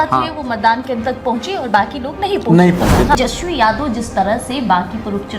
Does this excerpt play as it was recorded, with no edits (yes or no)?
no